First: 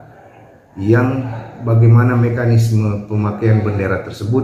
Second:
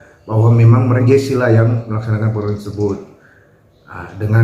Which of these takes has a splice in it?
second; 1 cut; at 1.0 s

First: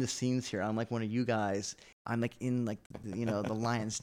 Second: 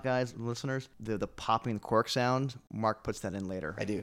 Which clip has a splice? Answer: second; 2 cuts; at 0.9 s, 2.6 s

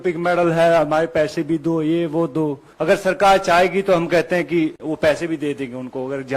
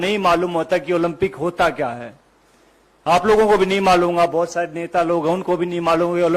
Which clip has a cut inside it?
first; 1 cut; at 2.7 s

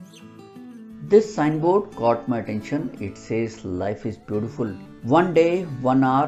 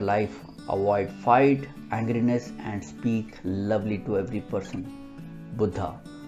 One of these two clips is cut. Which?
first; 1 cut; at 1.1 s

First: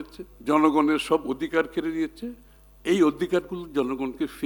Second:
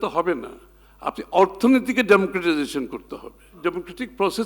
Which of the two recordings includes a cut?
second; 1 cut; at 3.4 s

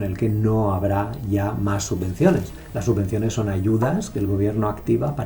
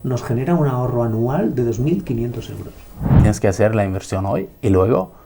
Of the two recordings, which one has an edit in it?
second; 1 cut; at 3.2 s

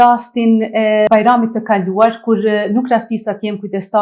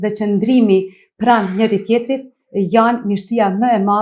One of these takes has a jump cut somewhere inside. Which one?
first; 1 cut; at 1.1 s

